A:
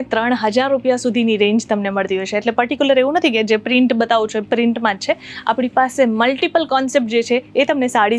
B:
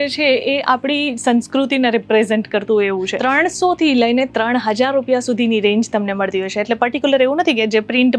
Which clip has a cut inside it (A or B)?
B